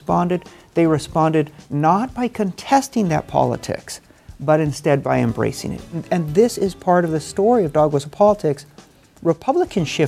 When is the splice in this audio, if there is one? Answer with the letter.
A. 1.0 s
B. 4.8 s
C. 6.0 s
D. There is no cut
C